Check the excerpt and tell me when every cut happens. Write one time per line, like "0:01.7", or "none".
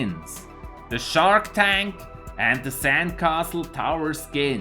0:01.2

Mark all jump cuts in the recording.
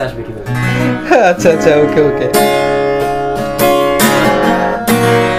none

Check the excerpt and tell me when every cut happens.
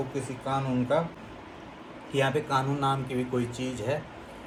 none

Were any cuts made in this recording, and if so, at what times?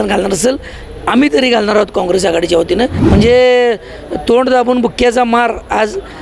0:03.0

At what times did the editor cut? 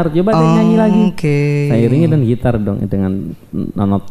none

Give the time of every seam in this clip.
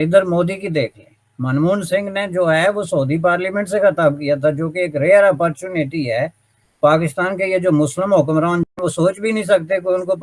none

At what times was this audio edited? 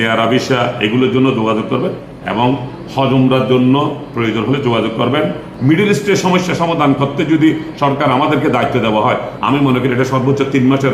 0:02.1
0:05.5

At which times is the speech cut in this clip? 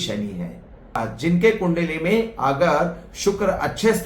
0:01.1

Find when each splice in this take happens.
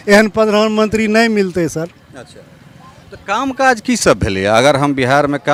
none

